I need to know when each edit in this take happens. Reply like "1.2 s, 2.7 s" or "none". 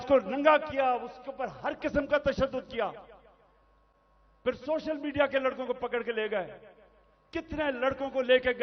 none